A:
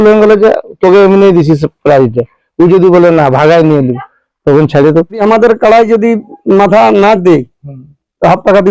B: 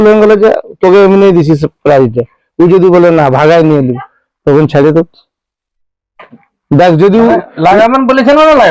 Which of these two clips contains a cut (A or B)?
A